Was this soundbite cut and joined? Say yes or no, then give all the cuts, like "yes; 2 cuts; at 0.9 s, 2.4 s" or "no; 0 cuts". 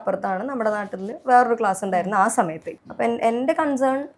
yes; 1 cut; at 2.6 s